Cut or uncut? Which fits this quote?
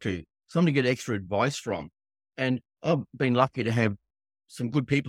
uncut